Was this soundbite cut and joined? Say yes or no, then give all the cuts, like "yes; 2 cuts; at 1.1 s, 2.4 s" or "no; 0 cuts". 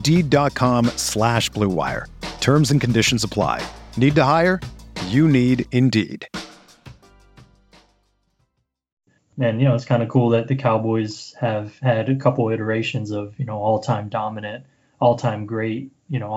yes; 1 cut; at 9.2 s